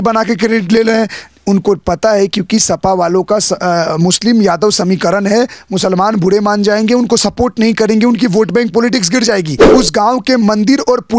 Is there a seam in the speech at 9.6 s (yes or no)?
yes